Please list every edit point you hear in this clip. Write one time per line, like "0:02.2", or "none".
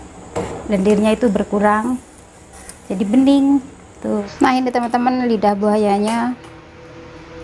0:03.8